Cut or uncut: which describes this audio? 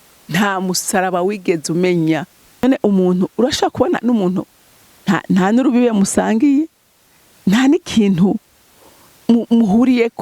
cut